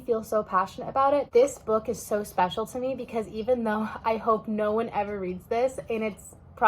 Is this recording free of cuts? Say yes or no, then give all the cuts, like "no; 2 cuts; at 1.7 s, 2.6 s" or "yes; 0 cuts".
no; 1 cut; at 1.3 s